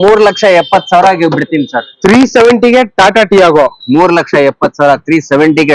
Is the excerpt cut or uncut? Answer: uncut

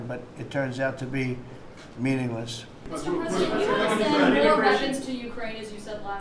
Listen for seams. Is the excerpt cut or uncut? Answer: cut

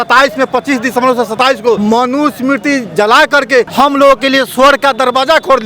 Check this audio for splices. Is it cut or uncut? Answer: cut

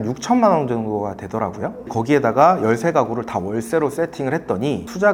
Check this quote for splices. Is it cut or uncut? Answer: uncut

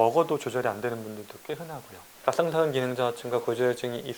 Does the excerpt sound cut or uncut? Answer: uncut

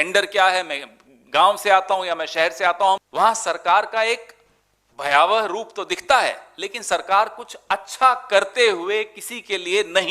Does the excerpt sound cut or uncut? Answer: cut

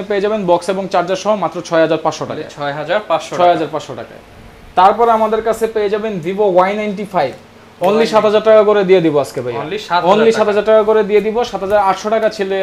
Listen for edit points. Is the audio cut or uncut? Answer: uncut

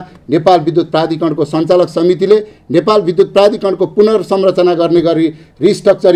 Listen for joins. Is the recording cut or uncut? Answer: uncut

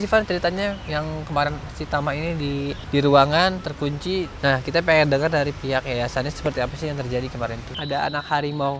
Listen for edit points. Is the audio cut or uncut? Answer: cut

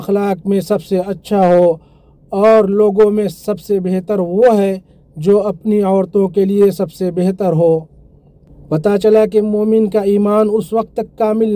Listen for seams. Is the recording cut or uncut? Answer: uncut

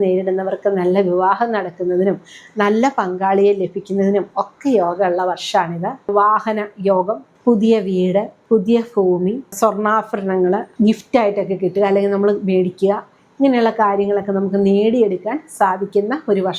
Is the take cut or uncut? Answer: cut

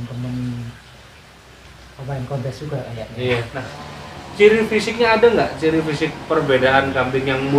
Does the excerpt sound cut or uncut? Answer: cut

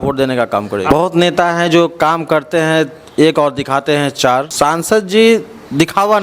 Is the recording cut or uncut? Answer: cut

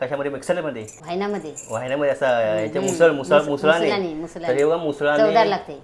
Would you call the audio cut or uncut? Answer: cut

